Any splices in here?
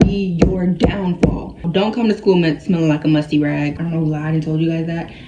yes; 2 cuts; at 1.6 s, 3.7 s

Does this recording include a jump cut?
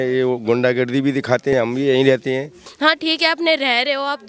yes; 2 cuts; at 1.5 s, 2.6 s

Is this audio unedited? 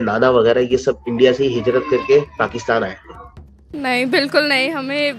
no; 1 cut; at 3.6 s

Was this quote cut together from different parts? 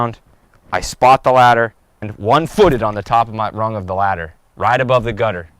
yes; 1 cut; at 2.1 s

